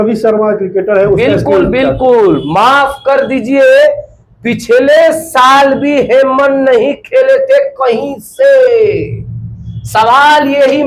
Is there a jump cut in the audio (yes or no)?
no